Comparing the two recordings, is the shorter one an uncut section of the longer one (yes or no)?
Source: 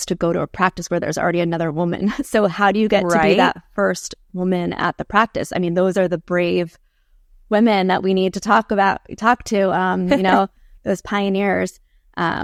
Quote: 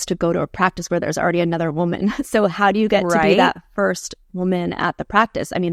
yes